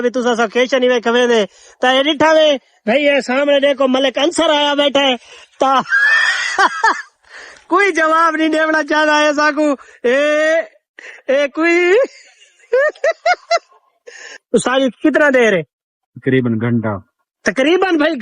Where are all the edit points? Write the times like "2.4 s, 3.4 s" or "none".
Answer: 14.4 s

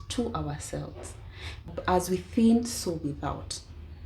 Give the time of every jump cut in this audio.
1.7 s

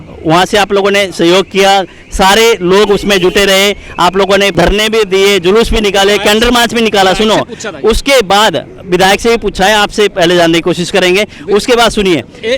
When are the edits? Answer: 4.5 s

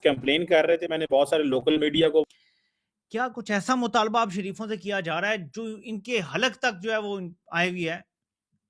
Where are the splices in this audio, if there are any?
2.2 s

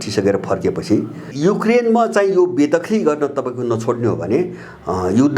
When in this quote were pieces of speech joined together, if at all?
1.2 s

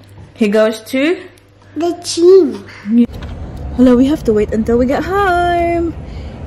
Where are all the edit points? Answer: 3.0 s

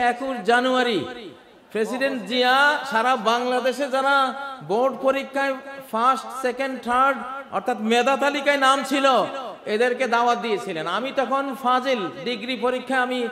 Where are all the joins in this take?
none

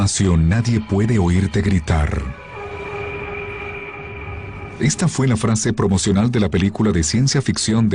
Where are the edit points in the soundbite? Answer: 5.1 s

